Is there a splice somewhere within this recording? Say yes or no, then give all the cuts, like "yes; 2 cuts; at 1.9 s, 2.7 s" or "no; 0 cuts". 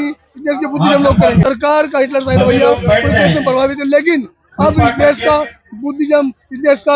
yes; 1 cut; at 1.4 s